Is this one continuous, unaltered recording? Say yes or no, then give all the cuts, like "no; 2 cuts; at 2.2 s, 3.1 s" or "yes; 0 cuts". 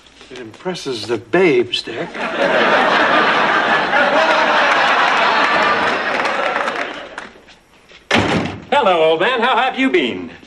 no; 1 cut; at 6.4 s